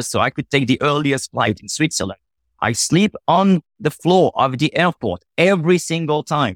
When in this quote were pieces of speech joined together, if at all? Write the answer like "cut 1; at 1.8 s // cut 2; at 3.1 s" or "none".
none